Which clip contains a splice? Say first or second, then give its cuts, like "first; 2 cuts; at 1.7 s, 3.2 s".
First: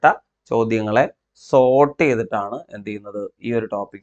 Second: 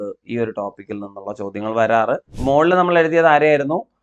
second; 1 cut; at 2.3 s